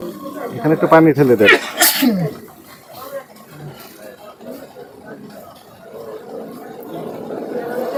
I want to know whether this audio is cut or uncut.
uncut